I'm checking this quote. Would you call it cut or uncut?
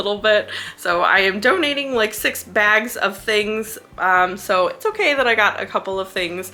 uncut